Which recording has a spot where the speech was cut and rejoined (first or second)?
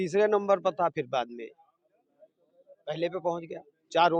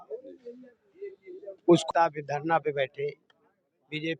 second